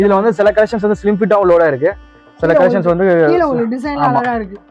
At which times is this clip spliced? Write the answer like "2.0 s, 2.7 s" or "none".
none